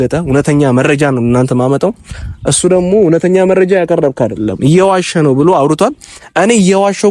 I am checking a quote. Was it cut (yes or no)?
no